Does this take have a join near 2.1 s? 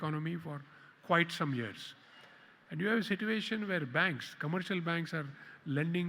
no; 0 cuts

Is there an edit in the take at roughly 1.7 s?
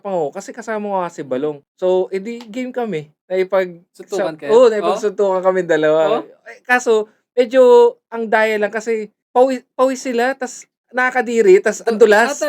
yes; 2 cuts; at 1.7 s, 9.1 s

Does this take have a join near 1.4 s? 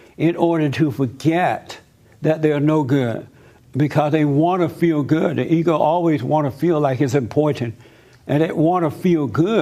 no; 1 cut; at 6.2 s

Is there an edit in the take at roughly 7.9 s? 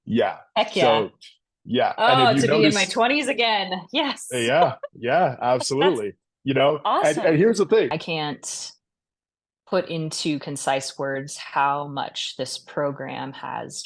yes; 1 cut; at 7.9 s

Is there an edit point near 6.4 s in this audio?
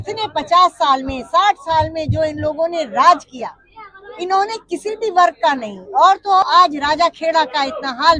yes; 1 cut; at 6.4 s

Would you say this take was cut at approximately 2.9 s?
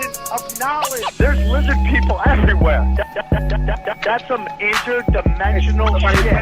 no; 1 cut; at 1.6 s

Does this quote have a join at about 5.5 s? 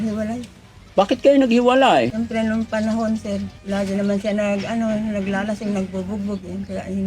no; 2 cuts; at 2.1 s, 3.5 s

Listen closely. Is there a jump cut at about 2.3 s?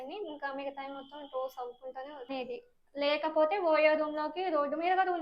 yes; 1 cut; at 2.3 s

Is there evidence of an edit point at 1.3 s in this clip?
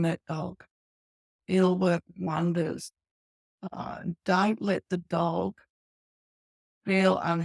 yes; 1 cut; at 1.3 s

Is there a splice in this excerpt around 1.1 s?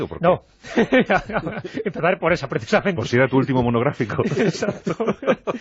yes; 1 cut; at 1.1 s

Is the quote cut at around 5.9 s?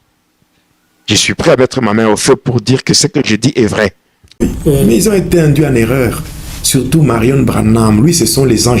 no; 1 cut; at 4.4 s

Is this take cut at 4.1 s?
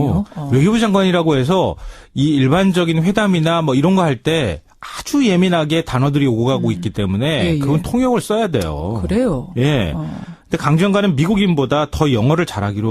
no; 1 cut; at 10.8 s

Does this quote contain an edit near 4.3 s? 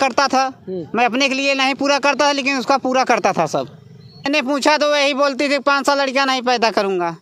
yes; 1 cut; at 4.3 s

